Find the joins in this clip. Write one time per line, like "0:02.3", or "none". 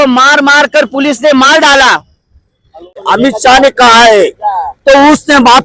0:03.0